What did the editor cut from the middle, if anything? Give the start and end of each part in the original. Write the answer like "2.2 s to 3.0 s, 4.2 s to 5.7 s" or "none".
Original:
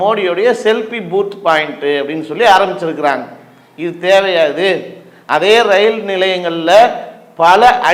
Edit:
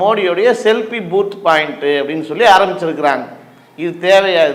none